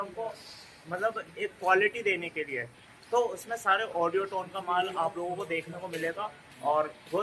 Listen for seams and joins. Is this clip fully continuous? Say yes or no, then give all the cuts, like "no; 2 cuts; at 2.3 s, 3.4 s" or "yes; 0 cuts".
yes; 0 cuts